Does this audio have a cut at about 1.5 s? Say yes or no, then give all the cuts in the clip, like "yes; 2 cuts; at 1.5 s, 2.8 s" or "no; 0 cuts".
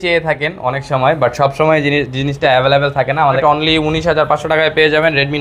no; 1 cut; at 3.4 s